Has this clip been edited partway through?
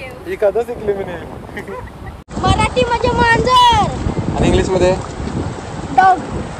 yes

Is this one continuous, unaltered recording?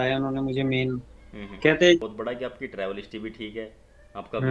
no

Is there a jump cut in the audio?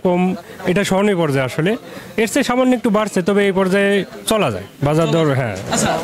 no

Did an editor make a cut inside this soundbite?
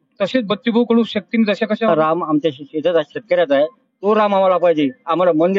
yes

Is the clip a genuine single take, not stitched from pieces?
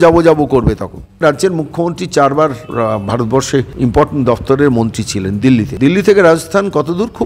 no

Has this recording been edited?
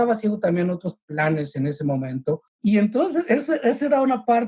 yes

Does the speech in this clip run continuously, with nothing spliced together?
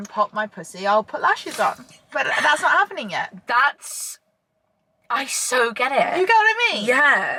yes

